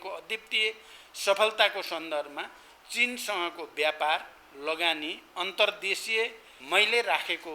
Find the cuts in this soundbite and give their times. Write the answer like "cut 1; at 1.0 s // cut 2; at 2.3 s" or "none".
cut 1; at 6.5 s

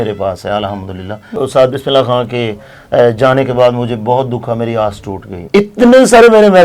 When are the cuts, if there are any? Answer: cut 1; at 1.4 s // cut 2; at 5.4 s

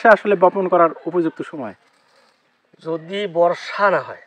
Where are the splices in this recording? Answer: none

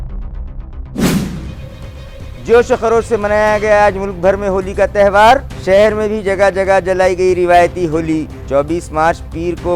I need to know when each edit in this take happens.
cut 1; at 1.2 s

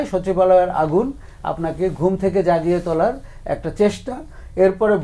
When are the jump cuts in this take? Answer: none

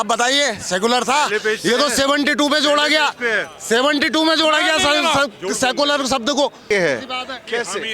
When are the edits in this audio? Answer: cut 1; at 6.7 s

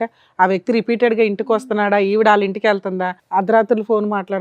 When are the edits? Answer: cut 1; at 3.1 s

